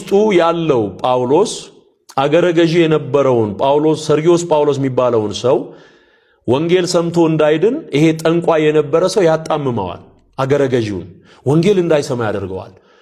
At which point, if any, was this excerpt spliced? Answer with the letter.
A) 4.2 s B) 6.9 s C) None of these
C